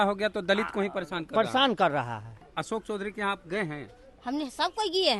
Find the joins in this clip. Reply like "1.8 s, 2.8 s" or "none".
2.4 s